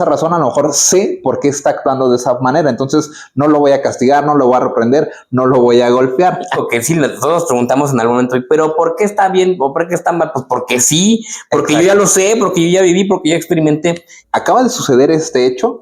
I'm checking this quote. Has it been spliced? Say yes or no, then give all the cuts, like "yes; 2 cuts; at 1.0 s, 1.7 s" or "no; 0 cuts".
yes; 2 cuts; at 6.6 s, 14.2 s